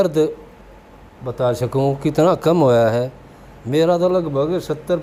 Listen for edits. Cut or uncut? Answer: uncut